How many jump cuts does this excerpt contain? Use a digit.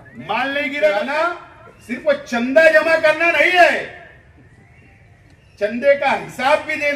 1